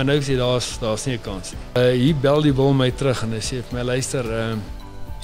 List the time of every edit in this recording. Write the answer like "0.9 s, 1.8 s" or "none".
1.8 s